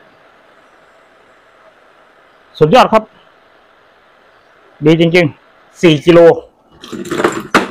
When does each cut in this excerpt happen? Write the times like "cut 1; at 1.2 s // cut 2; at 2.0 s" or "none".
cut 1; at 5.7 s